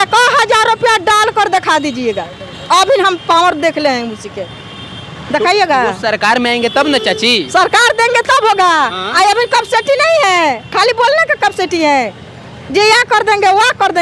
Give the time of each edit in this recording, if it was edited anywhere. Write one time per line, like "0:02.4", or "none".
none